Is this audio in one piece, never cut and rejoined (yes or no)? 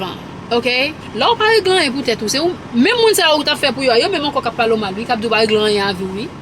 no